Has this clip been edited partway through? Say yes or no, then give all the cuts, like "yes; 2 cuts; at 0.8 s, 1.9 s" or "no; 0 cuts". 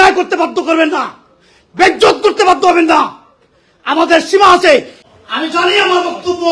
yes; 1 cut; at 5.0 s